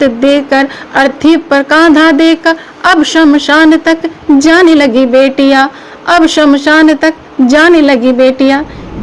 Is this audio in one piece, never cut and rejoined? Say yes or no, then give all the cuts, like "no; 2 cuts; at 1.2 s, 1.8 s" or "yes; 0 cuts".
yes; 0 cuts